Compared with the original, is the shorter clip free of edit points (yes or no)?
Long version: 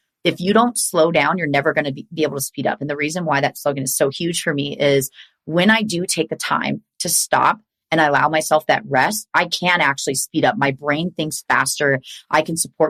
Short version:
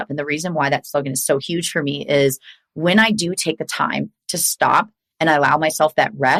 yes